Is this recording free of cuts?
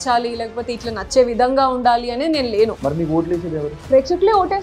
yes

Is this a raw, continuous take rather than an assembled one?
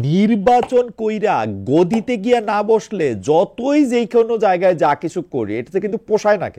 yes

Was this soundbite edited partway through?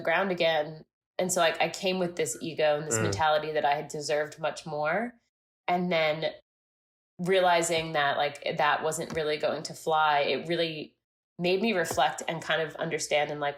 no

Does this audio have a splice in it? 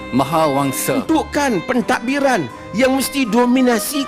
yes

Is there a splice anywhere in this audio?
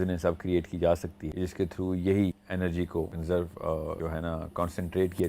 yes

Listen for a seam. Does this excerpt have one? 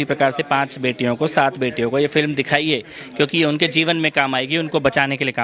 no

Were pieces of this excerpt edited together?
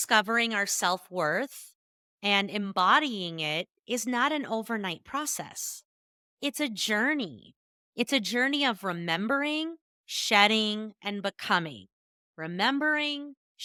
no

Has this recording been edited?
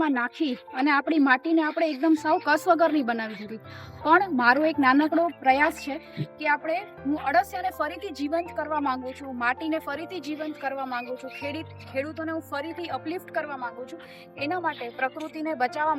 no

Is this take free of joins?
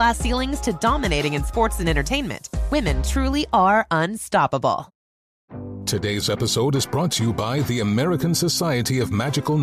yes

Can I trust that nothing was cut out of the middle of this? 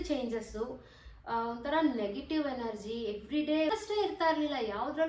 no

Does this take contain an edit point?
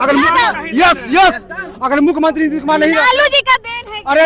no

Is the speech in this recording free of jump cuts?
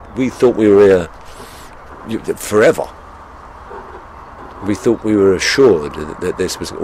yes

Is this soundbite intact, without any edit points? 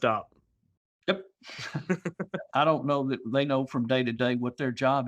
no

